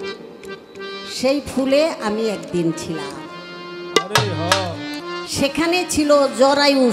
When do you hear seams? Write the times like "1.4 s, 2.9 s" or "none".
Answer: none